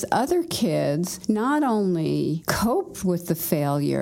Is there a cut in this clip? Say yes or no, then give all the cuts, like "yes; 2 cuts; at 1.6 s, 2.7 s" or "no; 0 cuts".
yes; 2 cuts; at 1.1 s, 2.5 s